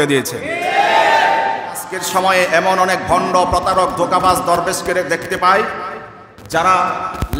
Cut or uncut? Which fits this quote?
cut